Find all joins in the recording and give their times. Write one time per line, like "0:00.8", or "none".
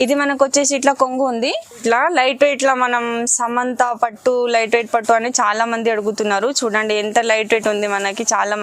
0:01.8